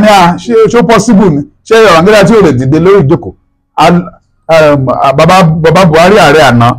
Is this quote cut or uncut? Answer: uncut